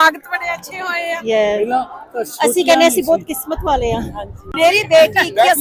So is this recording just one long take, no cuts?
no; 1 cut; at 4.5 s

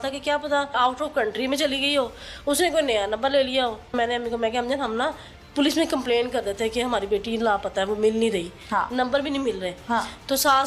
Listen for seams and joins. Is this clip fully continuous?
no; 2 cuts; at 0.8 s, 3.9 s

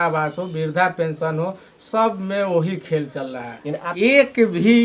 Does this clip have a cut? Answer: yes; 1 cut; at 3.9 s

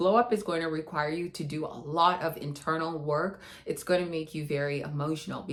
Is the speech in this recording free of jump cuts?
yes; 0 cuts

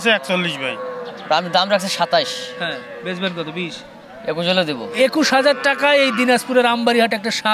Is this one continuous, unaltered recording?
no; 2 cuts; at 1.1 s, 4.8 s

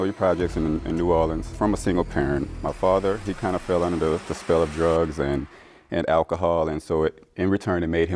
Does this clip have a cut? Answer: yes; 1 cut; at 1.5 s

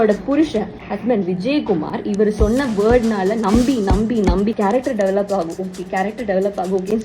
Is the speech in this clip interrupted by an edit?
yes; 1 cut; at 4.6 s

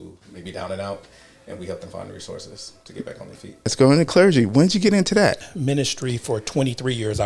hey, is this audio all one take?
no; 2 cuts; at 3.7 s, 5.5 s

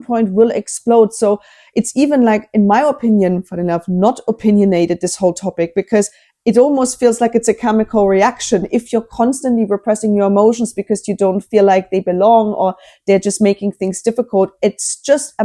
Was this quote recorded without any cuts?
yes; 0 cuts

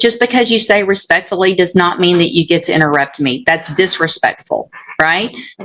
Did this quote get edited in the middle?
no; 0 cuts

